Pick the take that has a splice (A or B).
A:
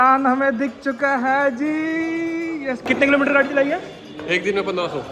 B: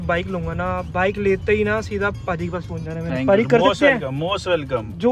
A